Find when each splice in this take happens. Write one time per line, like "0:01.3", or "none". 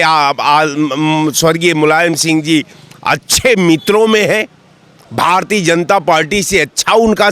none